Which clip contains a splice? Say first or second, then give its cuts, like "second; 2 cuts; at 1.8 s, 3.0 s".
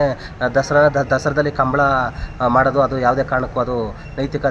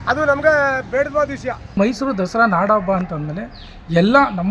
second; 1 cut; at 1.8 s